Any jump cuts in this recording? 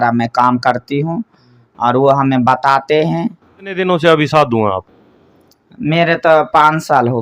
yes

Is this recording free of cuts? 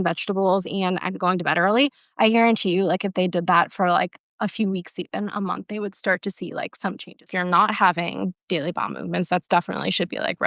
no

